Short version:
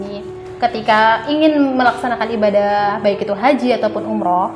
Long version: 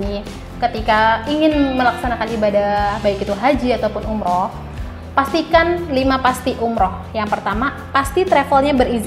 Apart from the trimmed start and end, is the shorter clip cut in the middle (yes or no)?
no